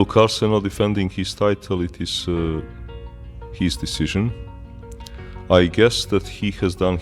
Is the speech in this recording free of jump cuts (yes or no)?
yes